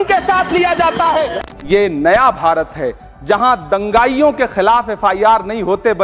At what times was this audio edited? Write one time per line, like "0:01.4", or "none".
0:01.4